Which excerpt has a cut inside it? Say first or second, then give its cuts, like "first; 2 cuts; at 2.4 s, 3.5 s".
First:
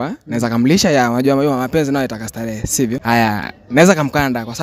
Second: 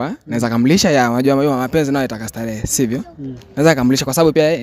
first; 1 cut; at 3.0 s